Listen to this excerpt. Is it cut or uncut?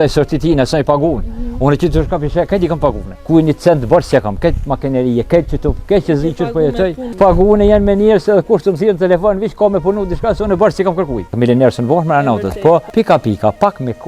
cut